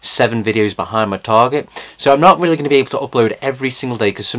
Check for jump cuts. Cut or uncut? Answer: uncut